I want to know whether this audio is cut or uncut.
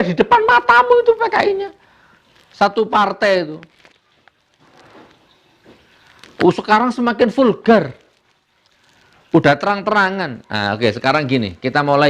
uncut